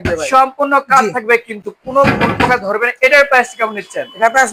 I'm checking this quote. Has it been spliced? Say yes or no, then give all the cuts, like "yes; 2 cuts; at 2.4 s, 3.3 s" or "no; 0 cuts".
no; 0 cuts